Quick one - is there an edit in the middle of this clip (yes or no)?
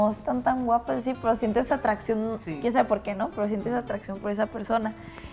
no